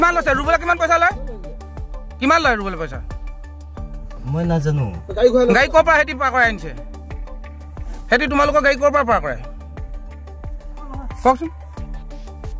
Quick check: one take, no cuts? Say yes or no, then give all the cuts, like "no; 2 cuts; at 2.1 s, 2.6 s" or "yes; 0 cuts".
yes; 0 cuts